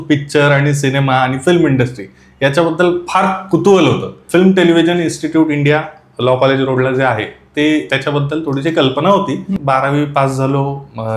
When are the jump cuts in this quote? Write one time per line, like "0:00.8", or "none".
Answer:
0:04.1
0:09.6